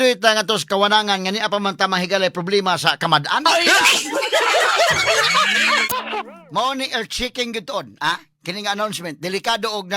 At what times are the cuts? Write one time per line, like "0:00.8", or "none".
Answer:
0:05.9